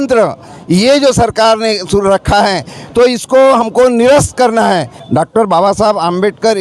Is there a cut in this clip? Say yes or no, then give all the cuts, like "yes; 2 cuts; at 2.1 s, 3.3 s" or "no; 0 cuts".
yes; 1 cut; at 5.0 s